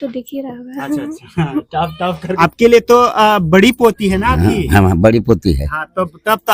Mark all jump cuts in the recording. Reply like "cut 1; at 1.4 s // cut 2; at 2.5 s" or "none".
cut 1; at 2.4 s